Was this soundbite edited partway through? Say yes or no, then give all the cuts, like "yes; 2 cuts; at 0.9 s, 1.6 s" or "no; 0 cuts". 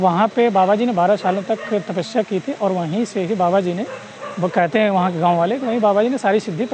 no; 0 cuts